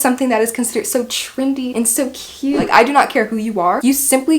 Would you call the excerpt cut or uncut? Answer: cut